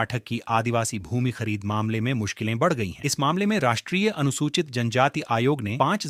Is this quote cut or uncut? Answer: uncut